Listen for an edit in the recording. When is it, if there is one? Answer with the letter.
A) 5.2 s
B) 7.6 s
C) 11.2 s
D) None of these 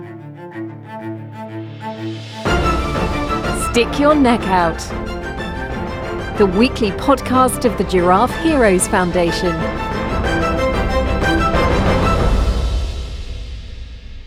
D